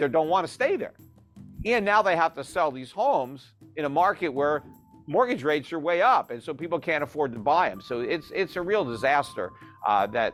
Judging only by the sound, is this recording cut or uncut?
uncut